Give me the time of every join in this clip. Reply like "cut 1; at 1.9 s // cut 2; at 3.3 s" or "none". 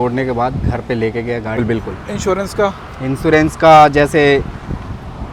cut 1; at 1.6 s